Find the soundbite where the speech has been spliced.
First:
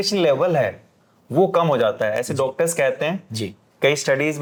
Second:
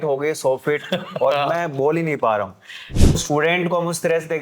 second; 1 cut; at 3.1 s

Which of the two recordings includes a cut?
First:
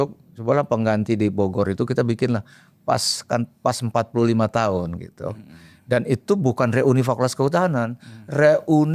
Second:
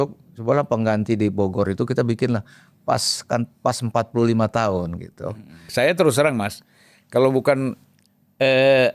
second; 1 cut; at 5.6 s

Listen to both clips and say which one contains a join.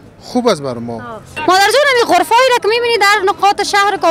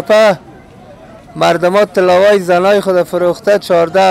first; 1 cut; at 1.3 s

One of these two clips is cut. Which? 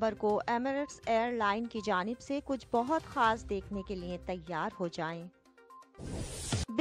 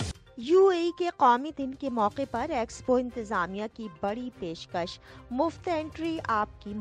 first; 1 cut; at 5.5 s

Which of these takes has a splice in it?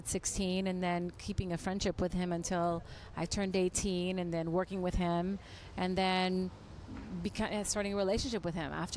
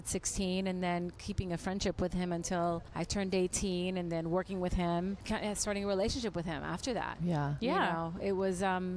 second; 2 cuts; at 2.9 s, 5.2 s

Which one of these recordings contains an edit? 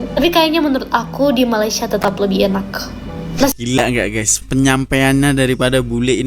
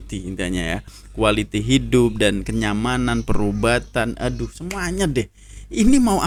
first; 1 cut; at 3.5 s

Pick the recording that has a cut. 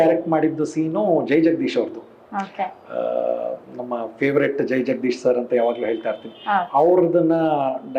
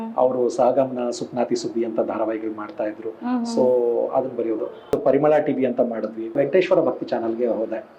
second; 2 cuts; at 4.9 s, 6.4 s

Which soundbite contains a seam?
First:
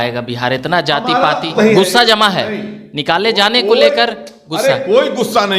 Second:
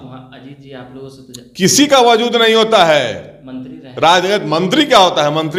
first; 1 cut; at 1.5 s

